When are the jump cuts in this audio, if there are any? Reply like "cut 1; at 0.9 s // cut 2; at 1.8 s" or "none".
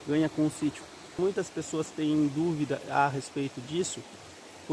cut 1; at 1.1 s